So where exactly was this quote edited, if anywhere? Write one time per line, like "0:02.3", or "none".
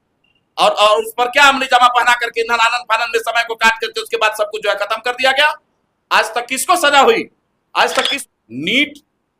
0:08.2